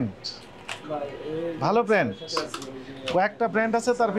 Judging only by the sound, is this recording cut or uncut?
uncut